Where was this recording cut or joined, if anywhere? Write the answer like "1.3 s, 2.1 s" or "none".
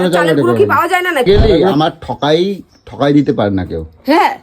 1.3 s